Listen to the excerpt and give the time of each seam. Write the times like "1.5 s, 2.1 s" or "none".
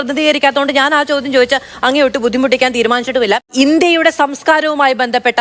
3.5 s